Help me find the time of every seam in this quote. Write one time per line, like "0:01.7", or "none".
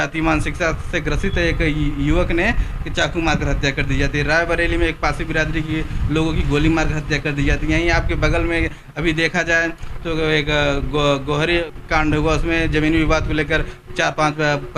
0:11.7

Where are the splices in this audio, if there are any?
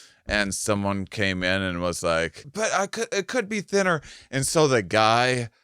0:02.4

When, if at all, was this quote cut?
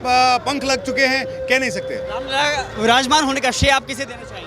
none

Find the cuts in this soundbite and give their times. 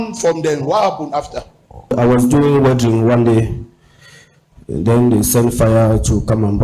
none

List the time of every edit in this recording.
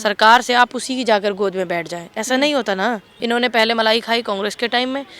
0:03.1

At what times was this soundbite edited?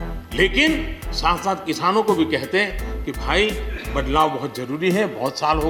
none

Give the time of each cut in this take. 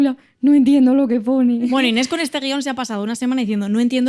0:01.7

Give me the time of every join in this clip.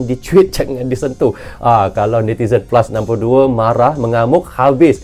none

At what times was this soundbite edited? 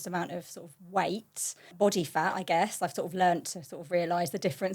0:01.7

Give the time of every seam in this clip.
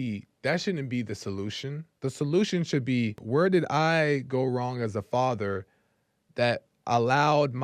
0:01.9
0:03.2

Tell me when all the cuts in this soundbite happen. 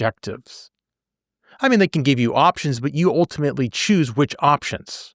none

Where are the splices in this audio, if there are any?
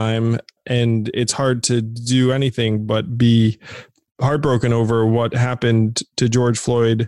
none

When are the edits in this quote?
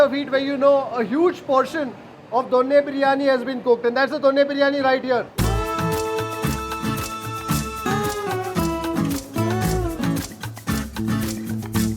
none

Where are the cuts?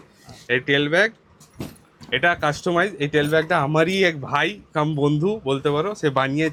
none

